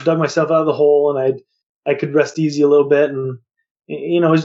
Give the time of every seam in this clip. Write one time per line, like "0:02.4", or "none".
none